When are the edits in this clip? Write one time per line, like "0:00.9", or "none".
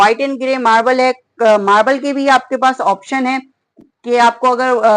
none